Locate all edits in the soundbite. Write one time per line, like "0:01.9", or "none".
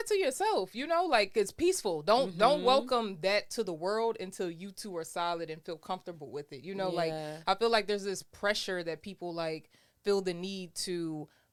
none